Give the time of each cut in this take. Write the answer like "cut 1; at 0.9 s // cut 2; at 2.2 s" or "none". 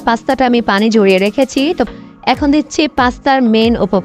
cut 1; at 1.8 s